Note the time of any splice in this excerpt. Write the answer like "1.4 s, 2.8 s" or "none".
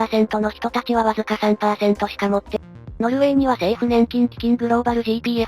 2.6 s